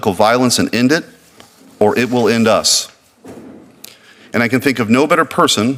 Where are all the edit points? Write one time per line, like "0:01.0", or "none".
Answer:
none